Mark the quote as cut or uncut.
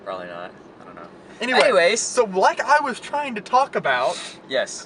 uncut